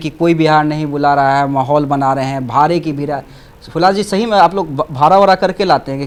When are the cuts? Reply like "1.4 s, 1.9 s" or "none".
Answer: none